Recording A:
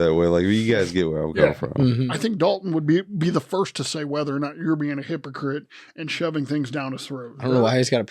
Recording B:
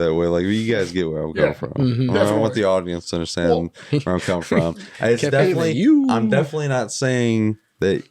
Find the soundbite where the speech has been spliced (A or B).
A